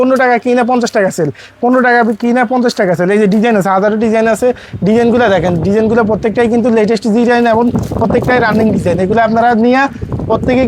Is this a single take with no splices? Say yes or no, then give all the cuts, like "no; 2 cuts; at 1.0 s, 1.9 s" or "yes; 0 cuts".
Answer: yes; 0 cuts